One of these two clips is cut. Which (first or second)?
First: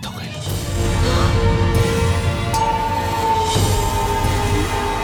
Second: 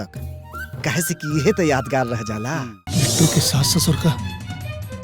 second